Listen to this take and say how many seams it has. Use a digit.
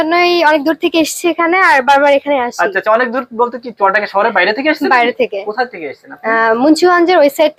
0